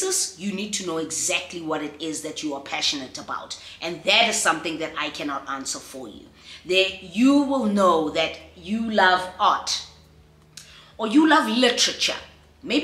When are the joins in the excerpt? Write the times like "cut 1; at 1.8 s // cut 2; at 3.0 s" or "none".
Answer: none